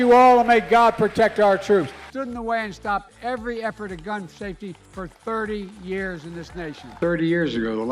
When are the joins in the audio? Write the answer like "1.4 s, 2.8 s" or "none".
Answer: 2.0 s, 6.8 s